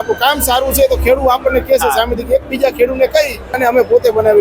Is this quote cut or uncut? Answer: cut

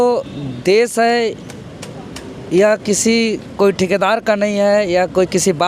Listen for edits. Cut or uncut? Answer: uncut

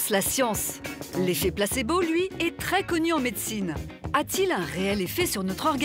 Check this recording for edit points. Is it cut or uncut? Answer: uncut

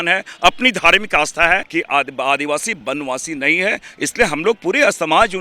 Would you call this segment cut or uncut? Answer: cut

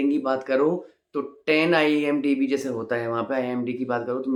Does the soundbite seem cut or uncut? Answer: uncut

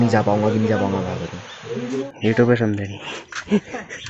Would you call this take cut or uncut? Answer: cut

